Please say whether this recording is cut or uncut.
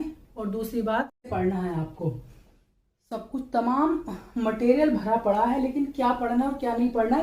cut